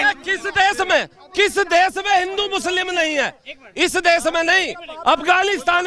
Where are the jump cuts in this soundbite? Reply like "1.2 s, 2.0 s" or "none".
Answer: none